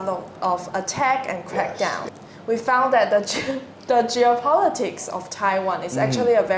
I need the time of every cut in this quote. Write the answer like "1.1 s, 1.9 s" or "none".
2.0 s